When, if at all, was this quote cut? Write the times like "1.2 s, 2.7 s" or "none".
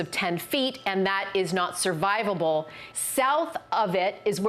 2.8 s